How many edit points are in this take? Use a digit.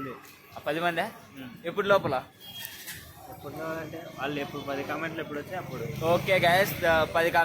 0